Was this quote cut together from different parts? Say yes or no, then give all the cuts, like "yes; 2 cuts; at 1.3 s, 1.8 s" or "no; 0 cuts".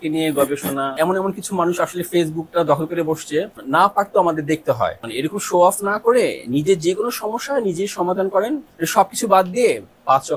yes; 4 cuts; at 0.9 s, 3.6 s, 5.0 s, 8.7 s